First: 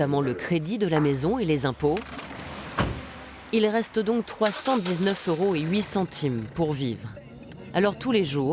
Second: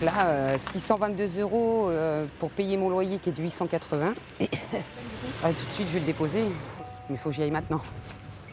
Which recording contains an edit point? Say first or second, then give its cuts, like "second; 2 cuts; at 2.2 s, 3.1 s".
second; 1 cut; at 5.2 s